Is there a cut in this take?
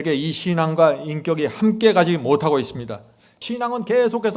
yes; 1 cut; at 3.4 s

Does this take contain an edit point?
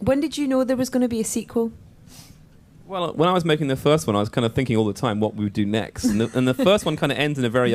yes; 1 cut; at 4.3 s

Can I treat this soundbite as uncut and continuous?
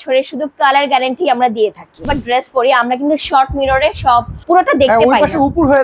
no; 2 cuts; at 2.1 s, 4.3 s

